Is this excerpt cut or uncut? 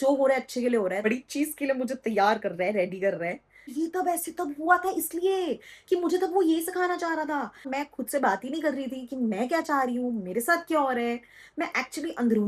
cut